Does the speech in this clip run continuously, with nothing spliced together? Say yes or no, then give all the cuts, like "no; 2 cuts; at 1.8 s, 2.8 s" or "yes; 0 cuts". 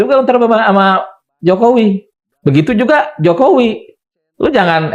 no; 1 cut; at 2.2 s